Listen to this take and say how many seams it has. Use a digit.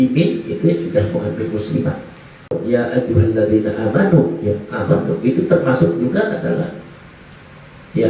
1